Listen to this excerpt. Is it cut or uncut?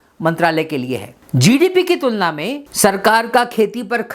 cut